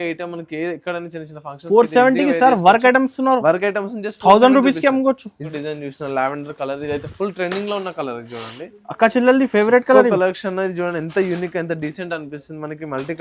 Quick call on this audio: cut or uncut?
cut